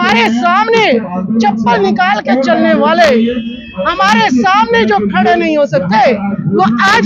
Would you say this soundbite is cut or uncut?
uncut